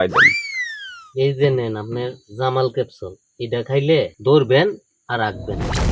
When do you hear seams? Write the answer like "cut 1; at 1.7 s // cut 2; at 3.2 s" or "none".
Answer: cut 1; at 4.1 s